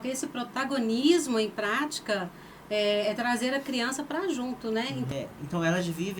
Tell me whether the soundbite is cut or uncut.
cut